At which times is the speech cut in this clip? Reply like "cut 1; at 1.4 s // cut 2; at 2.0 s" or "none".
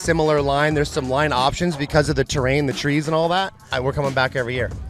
cut 1; at 3.6 s